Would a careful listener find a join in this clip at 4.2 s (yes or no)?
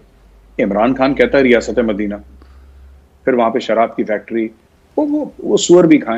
no